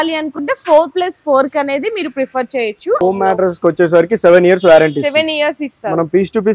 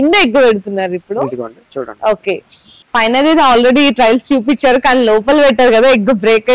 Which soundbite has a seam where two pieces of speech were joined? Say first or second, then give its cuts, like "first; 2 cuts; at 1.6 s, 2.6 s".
first; 1 cut; at 3.0 s